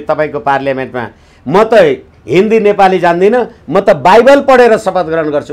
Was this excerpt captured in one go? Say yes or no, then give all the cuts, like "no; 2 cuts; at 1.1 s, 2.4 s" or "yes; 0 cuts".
yes; 0 cuts